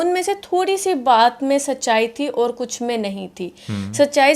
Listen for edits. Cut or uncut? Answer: uncut